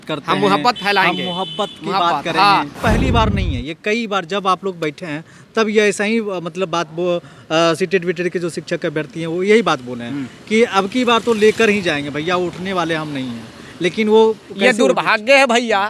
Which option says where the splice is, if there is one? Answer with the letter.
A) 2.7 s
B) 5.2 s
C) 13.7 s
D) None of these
A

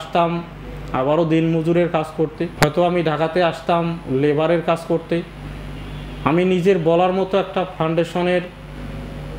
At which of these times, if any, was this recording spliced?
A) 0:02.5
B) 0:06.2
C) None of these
A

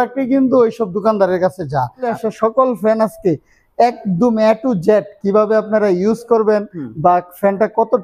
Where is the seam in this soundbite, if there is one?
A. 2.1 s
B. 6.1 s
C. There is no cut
A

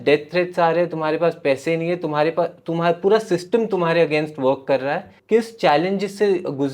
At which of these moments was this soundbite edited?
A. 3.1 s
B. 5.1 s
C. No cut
B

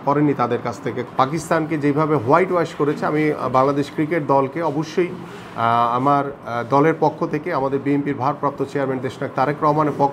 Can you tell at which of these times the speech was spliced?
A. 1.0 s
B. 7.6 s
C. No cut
A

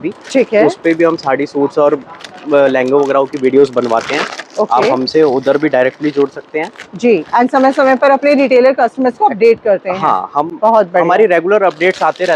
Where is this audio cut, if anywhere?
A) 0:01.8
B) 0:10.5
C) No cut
C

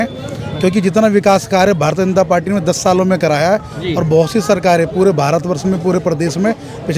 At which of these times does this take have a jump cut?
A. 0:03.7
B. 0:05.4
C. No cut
C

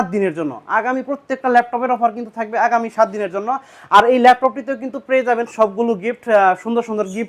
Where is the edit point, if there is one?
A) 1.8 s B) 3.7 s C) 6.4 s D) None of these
D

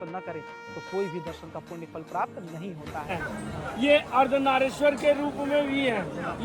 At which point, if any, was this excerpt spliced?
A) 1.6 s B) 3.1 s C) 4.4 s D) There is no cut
B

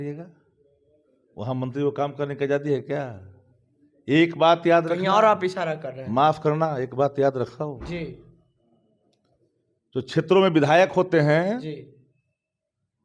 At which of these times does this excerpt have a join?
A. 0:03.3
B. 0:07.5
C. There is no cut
C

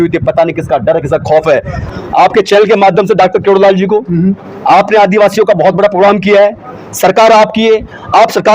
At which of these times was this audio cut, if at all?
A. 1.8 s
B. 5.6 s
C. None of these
A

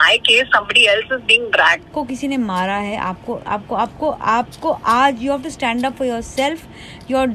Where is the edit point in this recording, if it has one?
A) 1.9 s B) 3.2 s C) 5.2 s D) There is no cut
A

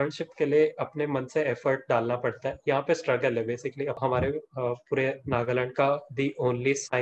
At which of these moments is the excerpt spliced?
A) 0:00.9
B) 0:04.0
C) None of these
B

